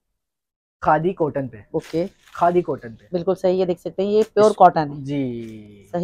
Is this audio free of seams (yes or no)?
yes